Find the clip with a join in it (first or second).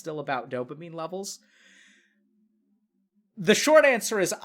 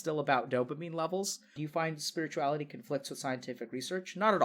second